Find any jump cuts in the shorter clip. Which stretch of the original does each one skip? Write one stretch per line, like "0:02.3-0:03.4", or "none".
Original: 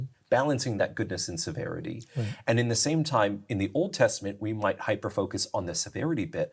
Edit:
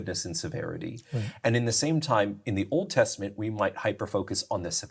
none